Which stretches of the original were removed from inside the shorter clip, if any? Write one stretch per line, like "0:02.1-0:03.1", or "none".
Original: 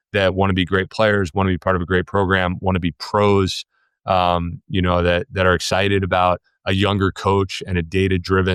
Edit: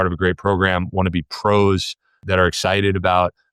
0:03.9-0:05.3